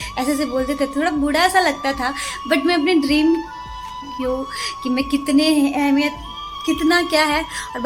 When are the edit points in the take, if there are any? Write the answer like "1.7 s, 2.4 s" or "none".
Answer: 4.1 s